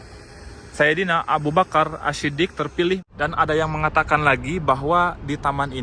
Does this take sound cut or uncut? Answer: cut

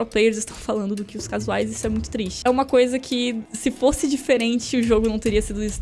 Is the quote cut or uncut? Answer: cut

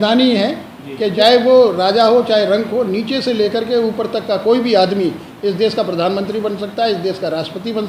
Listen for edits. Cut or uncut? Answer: uncut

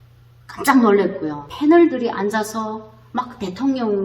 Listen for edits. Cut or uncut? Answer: cut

